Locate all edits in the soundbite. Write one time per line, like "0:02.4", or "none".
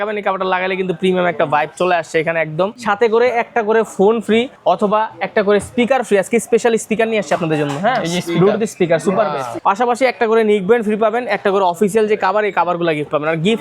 0:02.8
0:04.5
0:09.5